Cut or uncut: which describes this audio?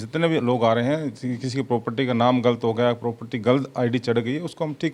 uncut